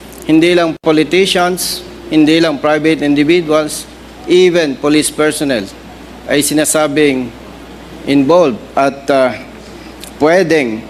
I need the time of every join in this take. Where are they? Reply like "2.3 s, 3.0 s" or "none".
none